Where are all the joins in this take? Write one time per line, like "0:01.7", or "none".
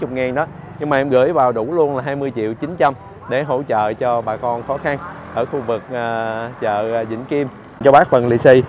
0:07.8